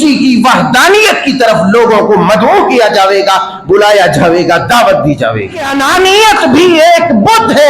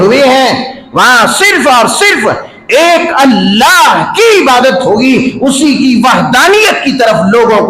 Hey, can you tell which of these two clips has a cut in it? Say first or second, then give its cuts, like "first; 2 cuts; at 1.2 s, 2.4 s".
first; 1 cut; at 5.8 s